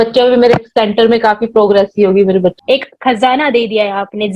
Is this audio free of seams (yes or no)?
no